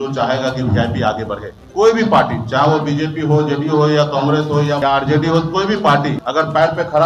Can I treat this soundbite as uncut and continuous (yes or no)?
no